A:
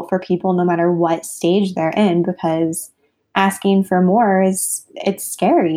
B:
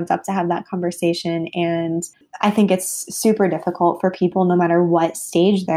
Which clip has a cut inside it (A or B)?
B